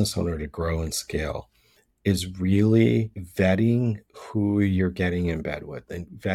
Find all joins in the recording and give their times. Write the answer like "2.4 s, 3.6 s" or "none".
3.2 s